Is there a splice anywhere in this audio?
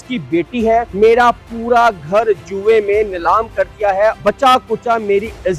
yes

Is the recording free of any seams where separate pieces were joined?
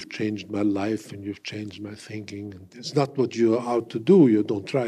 no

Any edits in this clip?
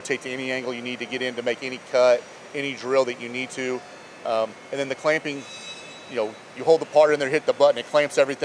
no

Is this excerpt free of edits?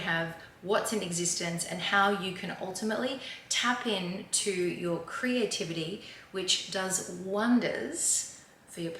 yes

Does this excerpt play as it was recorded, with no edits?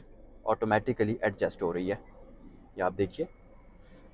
yes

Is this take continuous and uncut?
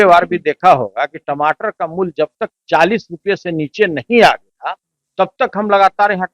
yes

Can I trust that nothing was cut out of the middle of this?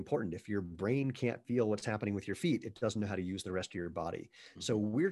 yes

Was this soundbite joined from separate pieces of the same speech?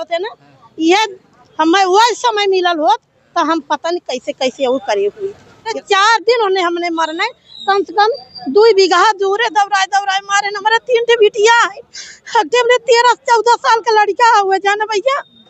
yes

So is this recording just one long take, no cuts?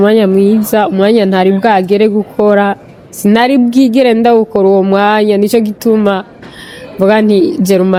yes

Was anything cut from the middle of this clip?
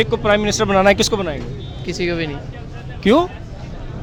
no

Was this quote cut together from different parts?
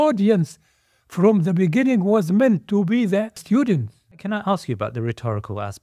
yes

